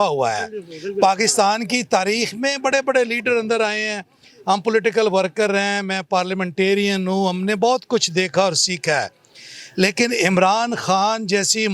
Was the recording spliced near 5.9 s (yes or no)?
no